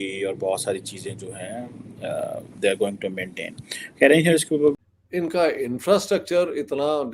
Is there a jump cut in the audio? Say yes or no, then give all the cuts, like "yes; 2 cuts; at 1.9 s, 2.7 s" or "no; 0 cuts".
yes; 1 cut; at 4.8 s